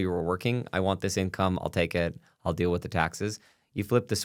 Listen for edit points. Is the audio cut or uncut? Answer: uncut